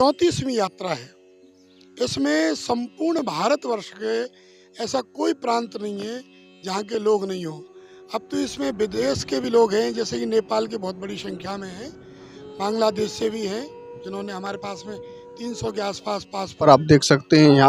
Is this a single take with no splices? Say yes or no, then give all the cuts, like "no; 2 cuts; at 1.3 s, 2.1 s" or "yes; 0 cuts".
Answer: no; 1 cut; at 16.6 s